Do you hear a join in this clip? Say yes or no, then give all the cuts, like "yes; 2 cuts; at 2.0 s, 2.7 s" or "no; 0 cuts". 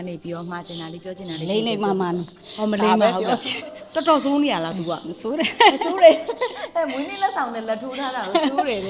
no; 0 cuts